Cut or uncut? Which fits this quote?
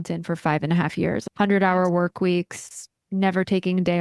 cut